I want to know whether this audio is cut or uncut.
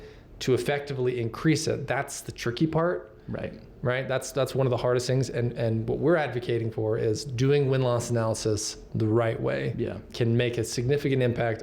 uncut